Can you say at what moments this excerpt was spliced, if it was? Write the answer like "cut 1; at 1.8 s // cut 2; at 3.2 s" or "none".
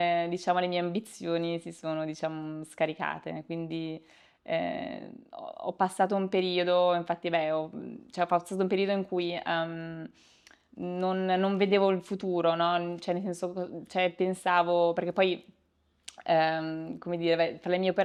none